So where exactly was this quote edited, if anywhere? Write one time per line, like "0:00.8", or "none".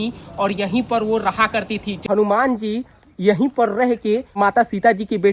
0:01.9
0:04.3